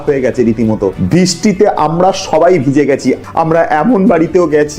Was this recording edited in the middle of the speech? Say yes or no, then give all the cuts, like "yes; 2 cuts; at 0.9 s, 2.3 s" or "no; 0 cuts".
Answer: yes; 2 cuts; at 1.0 s, 3.2 s